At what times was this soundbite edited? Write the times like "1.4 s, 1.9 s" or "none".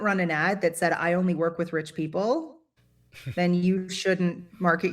none